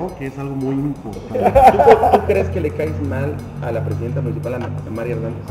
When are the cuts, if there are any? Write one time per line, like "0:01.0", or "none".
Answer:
0:01.3